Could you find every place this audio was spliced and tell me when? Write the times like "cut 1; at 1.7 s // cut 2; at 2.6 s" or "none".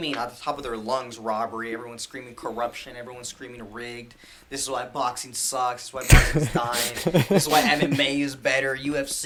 none